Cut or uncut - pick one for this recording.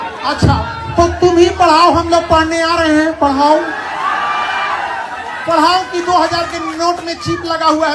uncut